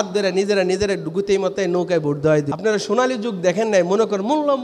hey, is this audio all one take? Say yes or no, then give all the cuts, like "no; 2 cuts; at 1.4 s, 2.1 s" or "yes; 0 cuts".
no; 1 cut; at 2.5 s